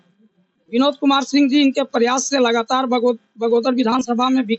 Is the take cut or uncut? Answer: uncut